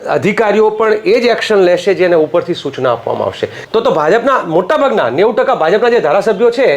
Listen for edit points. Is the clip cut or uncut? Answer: cut